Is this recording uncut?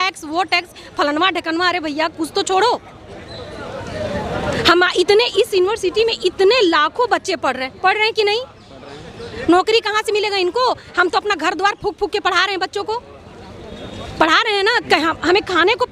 yes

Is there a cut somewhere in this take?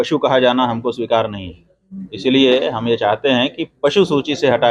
no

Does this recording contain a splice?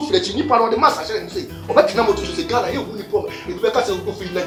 no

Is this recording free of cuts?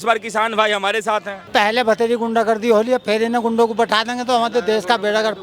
no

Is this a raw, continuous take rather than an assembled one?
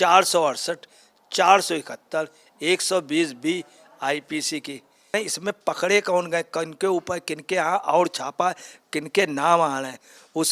no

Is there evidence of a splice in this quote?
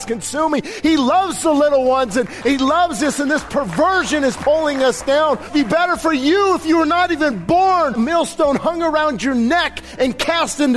yes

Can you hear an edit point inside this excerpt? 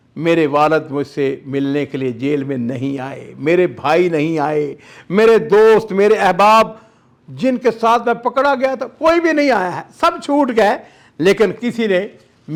no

